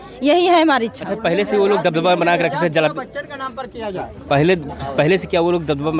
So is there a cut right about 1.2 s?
no; 0 cuts

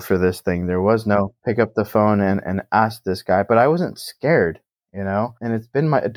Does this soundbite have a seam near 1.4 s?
yes; 1 cut; at 1.4 s

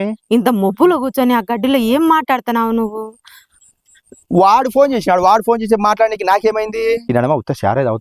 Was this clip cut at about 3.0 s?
no; 1 cut; at 7.0 s

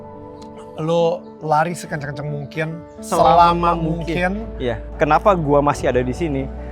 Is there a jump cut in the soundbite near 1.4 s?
no; 2 cuts; at 3.0 s, 4.9 s

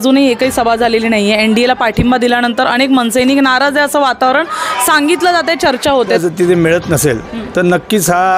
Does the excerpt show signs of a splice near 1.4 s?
no; 1 cut; at 6.2 s

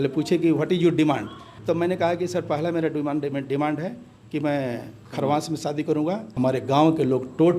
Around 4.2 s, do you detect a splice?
no; 2 cuts; at 1.5 s, 6.3 s

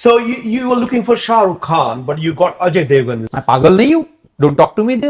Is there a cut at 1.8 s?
no; 1 cut; at 3.3 s

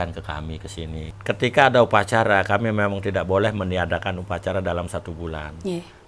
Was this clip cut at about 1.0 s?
yes; 1 cut; at 1.0 s

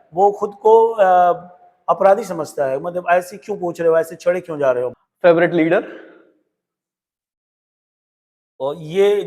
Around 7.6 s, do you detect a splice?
no; 1 cut; at 5.0 s

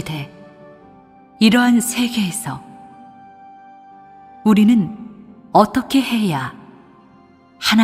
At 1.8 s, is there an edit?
yes; 1 cut; at 1.8 s

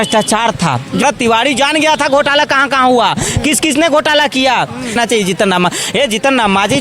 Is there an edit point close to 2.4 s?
no; 2 cuts; at 1.0 s, 5.0 s

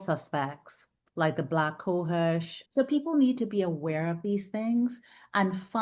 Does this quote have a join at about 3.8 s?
no; 1 cut; at 2.6 s

